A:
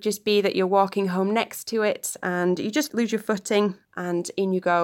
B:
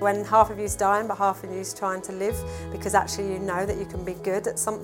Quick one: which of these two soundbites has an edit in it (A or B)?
A